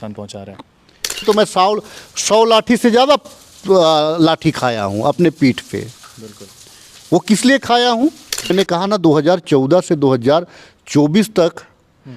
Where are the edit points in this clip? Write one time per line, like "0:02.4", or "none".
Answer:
0:01.2
0:08.5